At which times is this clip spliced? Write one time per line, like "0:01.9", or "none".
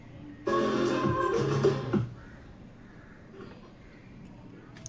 none